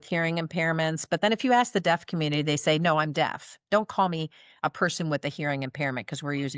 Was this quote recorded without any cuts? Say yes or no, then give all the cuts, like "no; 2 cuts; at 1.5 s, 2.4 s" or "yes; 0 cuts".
yes; 0 cuts